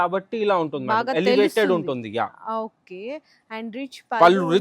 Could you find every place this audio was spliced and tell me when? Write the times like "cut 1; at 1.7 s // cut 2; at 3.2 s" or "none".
none